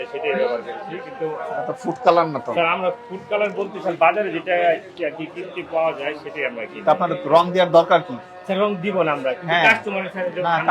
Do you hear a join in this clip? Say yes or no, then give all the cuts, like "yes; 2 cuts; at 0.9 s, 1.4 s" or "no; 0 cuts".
no; 0 cuts